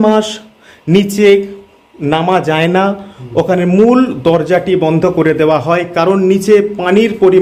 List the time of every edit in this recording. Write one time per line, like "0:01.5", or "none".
none